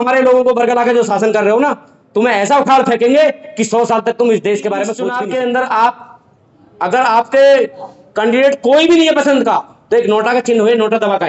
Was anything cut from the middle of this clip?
yes; 1 cut; at 5.0 s

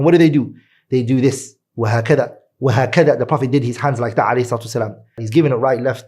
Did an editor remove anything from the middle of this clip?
yes; 1 cut; at 5.1 s

